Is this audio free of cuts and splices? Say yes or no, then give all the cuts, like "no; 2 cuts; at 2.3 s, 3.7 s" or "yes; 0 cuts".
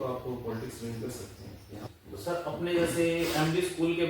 no; 1 cut; at 1.8 s